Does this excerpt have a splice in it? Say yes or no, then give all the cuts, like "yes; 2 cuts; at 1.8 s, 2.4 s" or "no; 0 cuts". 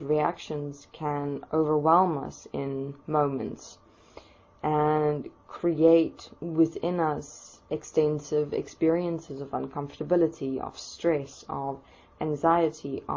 yes; 1 cut; at 8.7 s